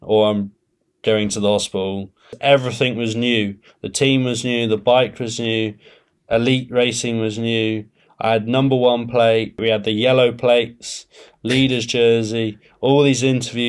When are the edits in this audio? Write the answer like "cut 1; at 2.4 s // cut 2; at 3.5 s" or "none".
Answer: cut 1; at 2.3 s // cut 2; at 9.6 s